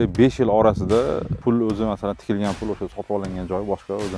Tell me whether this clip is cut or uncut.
cut